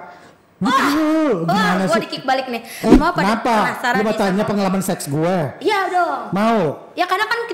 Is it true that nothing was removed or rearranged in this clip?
no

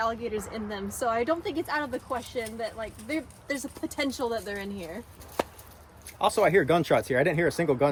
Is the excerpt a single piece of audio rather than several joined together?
yes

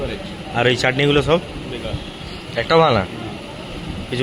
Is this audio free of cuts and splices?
yes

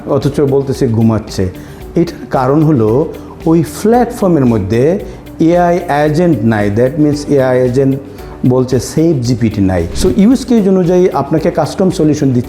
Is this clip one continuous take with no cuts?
no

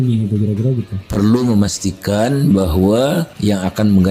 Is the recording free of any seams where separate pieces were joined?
no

